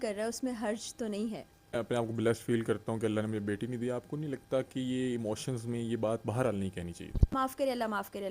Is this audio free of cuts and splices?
no; 2 cuts; at 1.7 s, 7.3 s

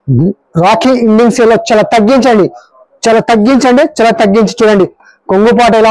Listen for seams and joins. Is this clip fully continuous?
yes; 0 cuts

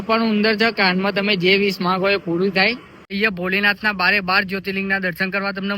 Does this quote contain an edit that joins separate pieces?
yes; 1 cut; at 3.0 s

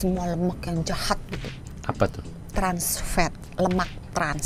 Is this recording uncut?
yes; 0 cuts

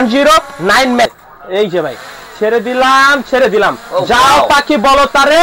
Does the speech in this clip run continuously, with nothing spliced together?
no; 1 cut; at 1.1 s

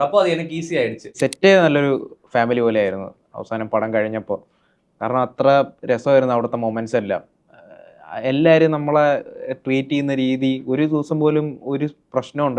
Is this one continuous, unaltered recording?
no; 1 cut; at 1.1 s

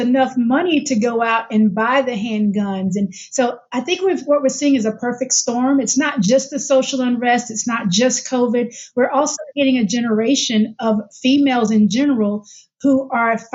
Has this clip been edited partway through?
no; 0 cuts

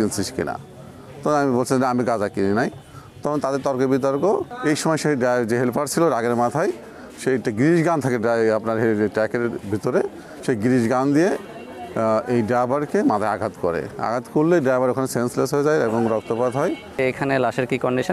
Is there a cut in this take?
yes; 2 cuts; at 4.5 s, 17.0 s

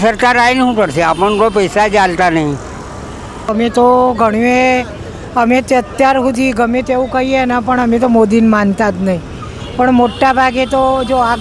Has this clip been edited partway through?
yes; 1 cut; at 3.5 s

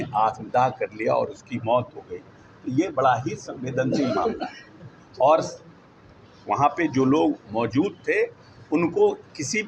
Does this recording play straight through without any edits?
yes; 0 cuts

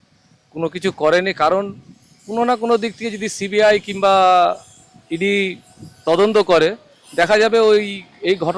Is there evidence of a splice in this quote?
no; 0 cuts

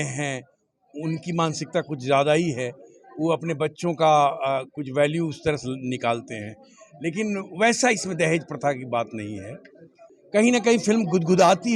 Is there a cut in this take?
yes; 1 cut; at 10.1 s

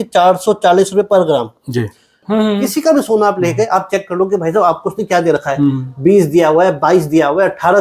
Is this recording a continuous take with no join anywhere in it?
no; 1 cut; at 2.2 s

